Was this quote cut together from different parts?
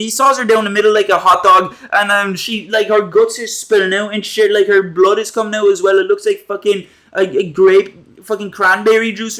no; 0 cuts

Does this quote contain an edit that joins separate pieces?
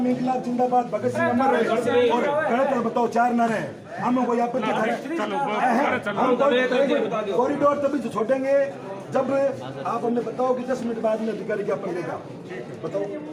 no; 0 cuts

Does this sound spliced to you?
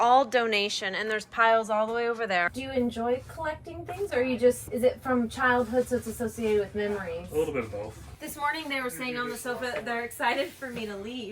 yes; 3 cuts; at 2.5 s, 4.7 s, 8.1 s

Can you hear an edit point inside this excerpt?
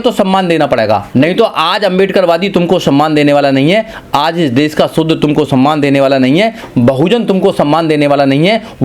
yes; 1 cut; at 1.1 s

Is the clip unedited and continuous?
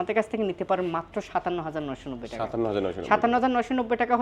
yes; 0 cuts

